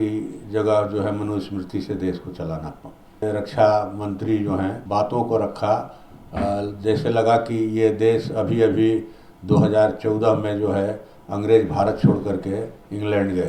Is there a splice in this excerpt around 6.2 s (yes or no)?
no